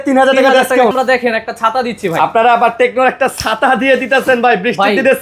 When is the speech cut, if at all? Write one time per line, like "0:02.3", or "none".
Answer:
0:00.9